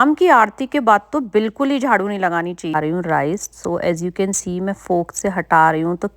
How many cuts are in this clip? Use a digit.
1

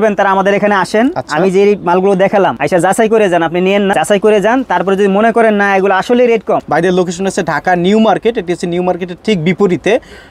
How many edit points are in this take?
3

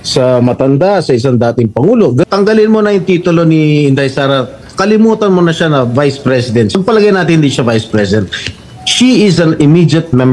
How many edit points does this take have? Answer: 2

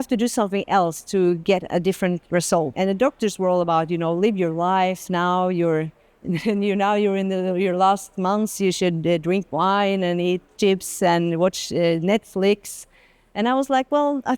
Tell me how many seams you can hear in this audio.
1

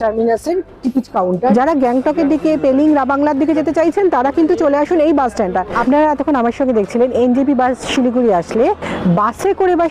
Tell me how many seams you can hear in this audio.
2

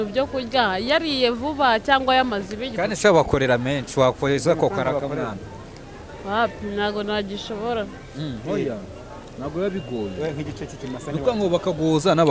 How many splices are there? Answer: 0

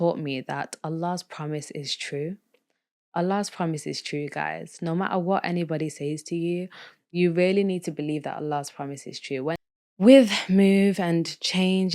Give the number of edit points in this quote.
1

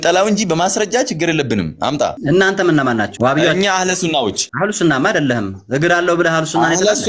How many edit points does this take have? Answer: 3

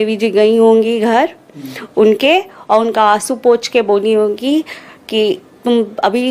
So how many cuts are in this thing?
0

